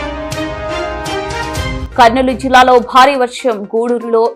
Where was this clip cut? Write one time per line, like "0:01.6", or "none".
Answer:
0:01.8